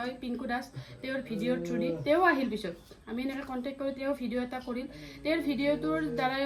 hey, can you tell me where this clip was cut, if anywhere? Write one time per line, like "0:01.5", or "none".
none